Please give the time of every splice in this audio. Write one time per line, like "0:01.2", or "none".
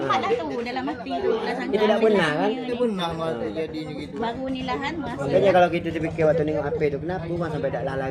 none